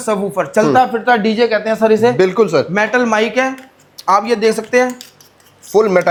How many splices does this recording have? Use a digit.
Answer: 0